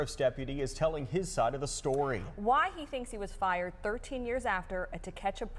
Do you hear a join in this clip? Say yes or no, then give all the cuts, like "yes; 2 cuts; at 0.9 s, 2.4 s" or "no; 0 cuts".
no; 0 cuts